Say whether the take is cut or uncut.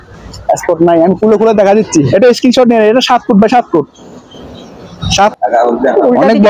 cut